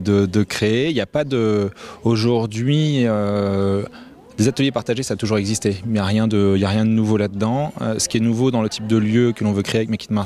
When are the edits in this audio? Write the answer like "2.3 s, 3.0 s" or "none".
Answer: 8.0 s